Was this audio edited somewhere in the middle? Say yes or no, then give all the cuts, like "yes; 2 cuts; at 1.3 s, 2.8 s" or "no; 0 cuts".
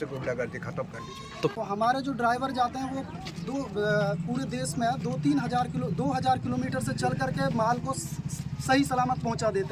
yes; 1 cut; at 1.6 s